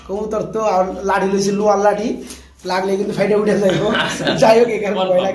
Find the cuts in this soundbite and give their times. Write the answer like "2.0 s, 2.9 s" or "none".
none

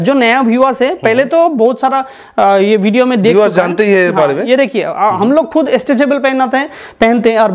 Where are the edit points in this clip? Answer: none

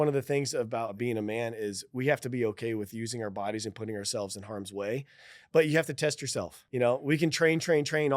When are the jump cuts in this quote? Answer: 0.9 s, 6.7 s

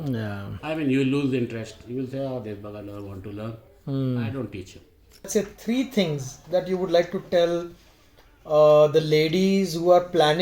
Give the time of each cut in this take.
5.3 s

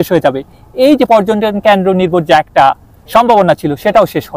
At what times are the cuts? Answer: none

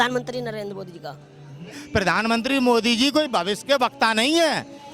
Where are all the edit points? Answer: 1.8 s

